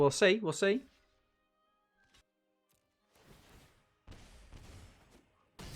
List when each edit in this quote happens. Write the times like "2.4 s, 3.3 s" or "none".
2.2 s